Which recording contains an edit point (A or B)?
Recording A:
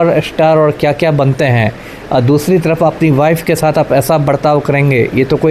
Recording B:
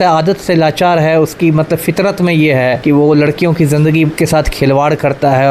B